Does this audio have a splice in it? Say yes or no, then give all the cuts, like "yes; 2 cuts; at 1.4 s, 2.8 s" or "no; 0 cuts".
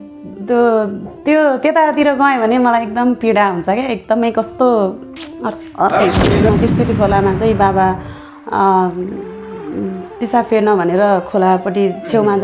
yes; 1 cut; at 6.5 s